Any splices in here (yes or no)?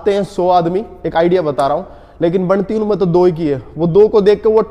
no